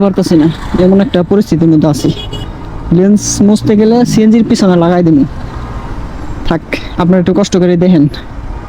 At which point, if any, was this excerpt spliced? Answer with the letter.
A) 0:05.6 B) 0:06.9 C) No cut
C